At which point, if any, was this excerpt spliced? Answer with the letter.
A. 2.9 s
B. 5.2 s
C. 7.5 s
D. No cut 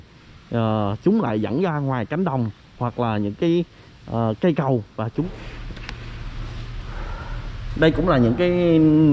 B